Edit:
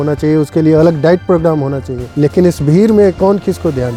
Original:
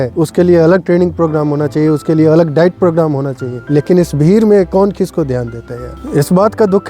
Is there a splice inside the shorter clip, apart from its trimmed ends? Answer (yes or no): no